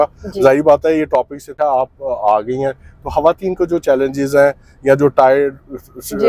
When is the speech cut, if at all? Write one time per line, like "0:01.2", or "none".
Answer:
0:01.4